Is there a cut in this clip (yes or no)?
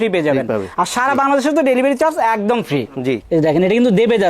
yes